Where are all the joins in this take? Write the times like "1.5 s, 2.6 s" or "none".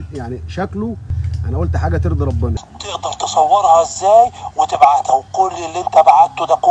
1.2 s, 2.6 s

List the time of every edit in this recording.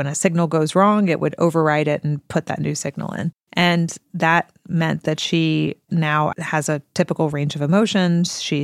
3.4 s, 6.3 s

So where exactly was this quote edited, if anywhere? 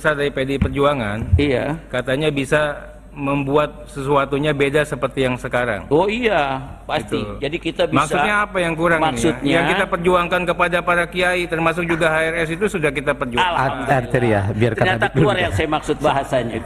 none

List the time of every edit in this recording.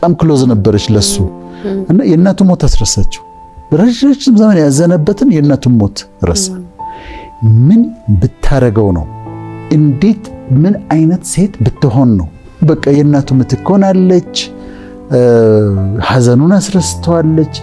none

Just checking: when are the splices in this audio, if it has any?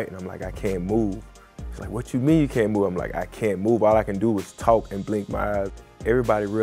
5.7 s

